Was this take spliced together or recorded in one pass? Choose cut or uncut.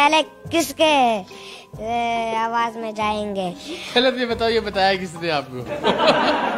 uncut